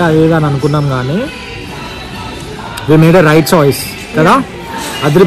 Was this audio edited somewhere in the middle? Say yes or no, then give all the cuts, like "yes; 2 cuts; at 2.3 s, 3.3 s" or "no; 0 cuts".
no; 0 cuts